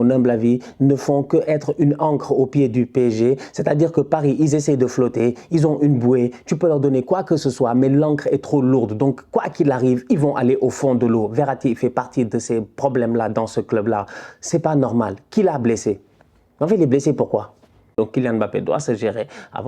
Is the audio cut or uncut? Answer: cut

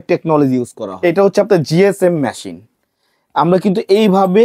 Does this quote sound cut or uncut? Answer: cut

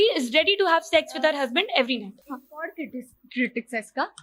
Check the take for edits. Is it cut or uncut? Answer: uncut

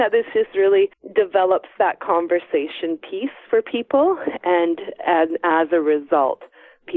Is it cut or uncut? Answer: cut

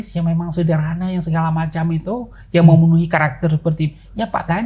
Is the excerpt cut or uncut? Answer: uncut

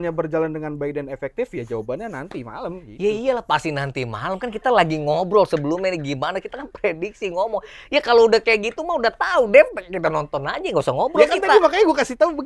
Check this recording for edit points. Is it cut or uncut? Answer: uncut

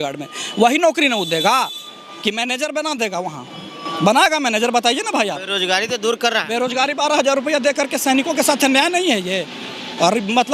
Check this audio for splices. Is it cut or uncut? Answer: uncut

